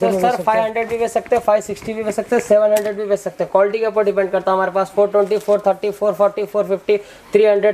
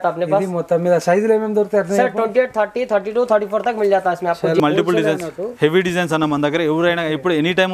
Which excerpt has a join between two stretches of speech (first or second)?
second